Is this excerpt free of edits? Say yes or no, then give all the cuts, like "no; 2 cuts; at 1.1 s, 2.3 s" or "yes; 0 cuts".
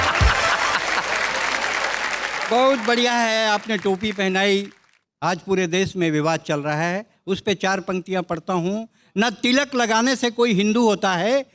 yes; 0 cuts